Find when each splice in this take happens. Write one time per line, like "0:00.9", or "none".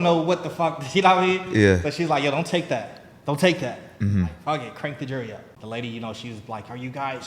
0:05.5